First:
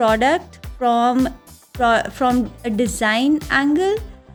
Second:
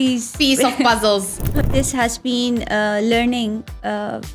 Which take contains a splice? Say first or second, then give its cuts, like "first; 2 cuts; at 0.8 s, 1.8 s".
second; 1 cut; at 1.5 s